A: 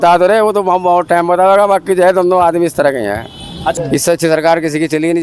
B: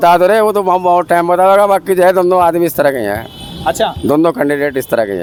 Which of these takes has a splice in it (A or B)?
A